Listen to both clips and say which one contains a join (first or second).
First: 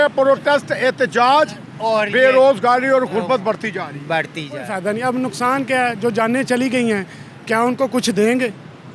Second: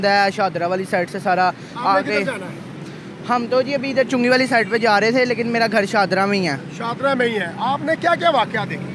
first